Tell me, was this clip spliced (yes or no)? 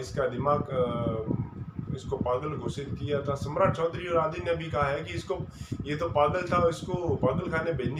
no